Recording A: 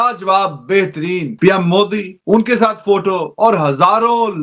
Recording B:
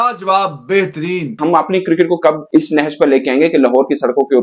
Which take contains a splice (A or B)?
B